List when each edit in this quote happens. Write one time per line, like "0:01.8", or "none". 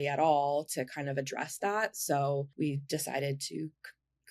0:02.5